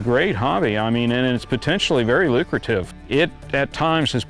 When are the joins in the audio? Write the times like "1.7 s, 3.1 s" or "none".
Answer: 3.0 s